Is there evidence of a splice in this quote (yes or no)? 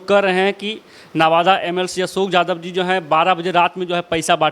no